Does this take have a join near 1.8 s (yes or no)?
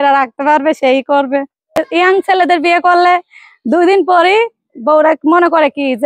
yes